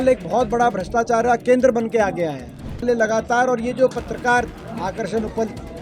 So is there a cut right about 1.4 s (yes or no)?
no